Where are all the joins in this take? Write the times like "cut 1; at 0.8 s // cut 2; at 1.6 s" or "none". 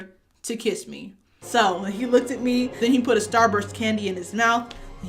cut 1; at 1.1 s